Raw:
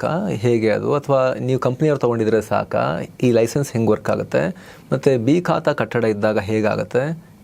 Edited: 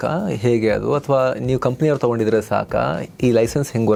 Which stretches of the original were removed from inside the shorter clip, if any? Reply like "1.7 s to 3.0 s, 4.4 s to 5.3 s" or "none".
none

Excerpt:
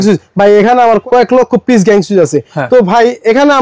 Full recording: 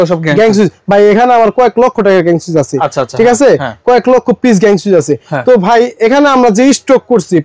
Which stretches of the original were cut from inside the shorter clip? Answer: 1.5 s to 3.8 s

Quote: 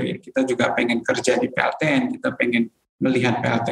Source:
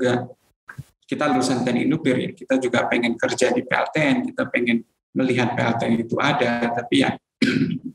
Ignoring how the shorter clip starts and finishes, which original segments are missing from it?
none

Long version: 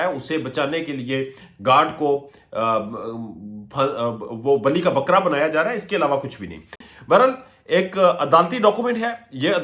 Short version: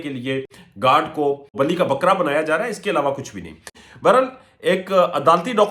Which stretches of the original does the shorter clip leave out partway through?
2.4 s to 4.6 s

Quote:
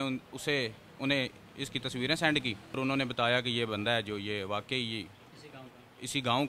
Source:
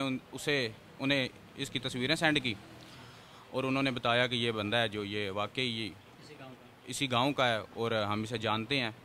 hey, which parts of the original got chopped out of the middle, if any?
2.8 s to 3.6 s

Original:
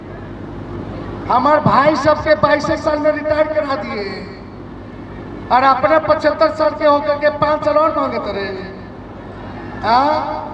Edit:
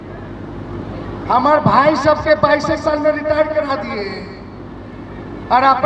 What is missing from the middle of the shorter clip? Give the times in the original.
none

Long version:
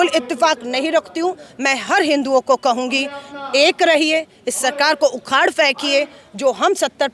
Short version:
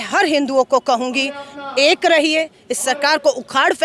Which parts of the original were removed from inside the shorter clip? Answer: none

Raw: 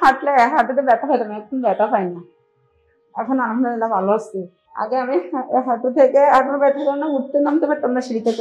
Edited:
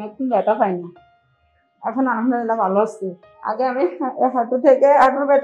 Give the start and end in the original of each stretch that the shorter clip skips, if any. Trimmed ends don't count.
none

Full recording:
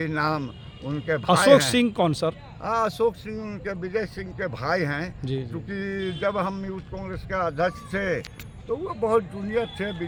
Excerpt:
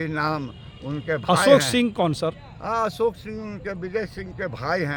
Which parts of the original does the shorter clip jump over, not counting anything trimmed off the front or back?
none

